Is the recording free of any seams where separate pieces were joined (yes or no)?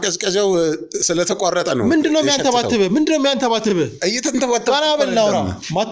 yes